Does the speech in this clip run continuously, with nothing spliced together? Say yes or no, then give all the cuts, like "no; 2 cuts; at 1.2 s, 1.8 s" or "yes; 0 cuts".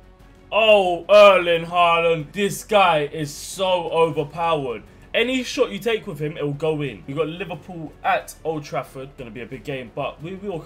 no; 3 cuts; at 2.3 s, 7.0 s, 9.1 s